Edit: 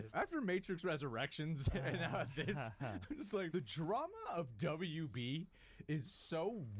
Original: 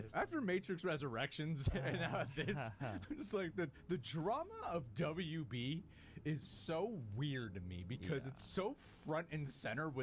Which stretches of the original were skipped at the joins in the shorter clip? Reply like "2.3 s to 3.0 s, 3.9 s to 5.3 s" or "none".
3.5 s to 3.9 s